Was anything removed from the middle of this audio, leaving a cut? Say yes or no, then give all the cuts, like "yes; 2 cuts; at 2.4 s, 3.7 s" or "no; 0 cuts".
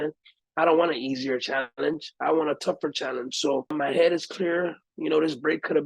yes; 1 cut; at 3.7 s